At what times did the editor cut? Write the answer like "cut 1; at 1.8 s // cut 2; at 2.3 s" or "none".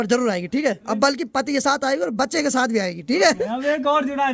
cut 1; at 0.8 s // cut 2; at 3.4 s